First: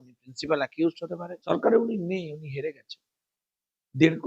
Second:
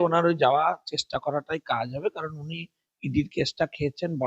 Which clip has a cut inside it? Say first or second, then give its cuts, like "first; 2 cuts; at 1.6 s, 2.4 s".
first; 1 cut; at 1.5 s